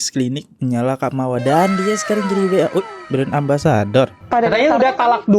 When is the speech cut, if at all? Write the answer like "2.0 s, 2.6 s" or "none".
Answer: 4.2 s